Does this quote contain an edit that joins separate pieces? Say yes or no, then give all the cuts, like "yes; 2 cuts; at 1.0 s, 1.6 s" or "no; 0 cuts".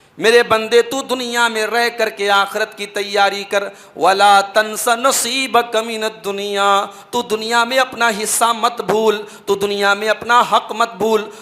no; 0 cuts